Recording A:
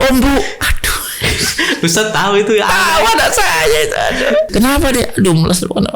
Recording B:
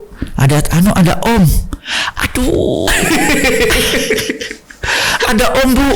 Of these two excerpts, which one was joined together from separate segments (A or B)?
A